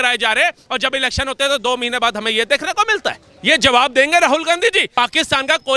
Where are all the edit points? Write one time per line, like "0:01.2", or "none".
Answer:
0:03.3
0:04.9